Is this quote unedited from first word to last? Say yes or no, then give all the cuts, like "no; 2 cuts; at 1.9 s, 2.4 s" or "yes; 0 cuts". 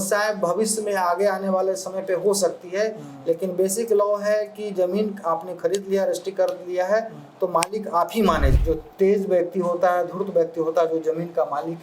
no; 1 cut; at 8.5 s